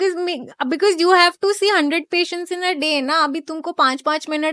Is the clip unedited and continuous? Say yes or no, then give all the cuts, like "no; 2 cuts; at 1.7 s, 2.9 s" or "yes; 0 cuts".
yes; 0 cuts